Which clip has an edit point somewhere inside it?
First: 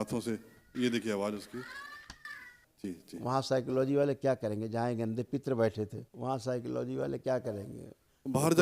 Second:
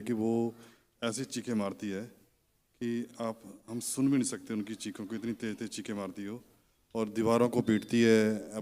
first; 2 cuts; at 2.6 s, 6.0 s

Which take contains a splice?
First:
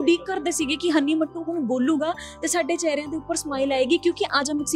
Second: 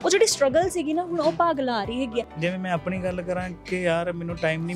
second; 1 cut; at 2.3 s

